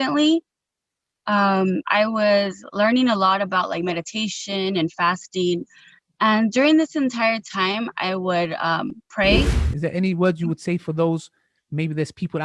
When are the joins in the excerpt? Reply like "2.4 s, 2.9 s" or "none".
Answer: 9.6 s